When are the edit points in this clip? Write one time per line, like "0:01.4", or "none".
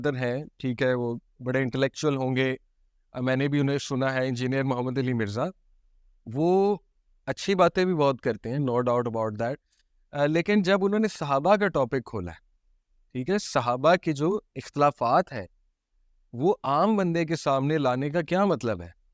none